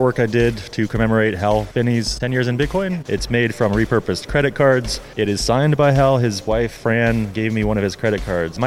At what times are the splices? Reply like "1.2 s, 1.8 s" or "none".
1.9 s, 3.0 s, 6.7 s